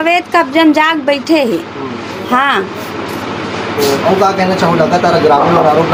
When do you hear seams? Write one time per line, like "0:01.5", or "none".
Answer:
none